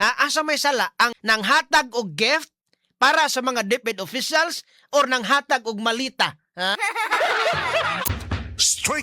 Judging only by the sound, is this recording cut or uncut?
cut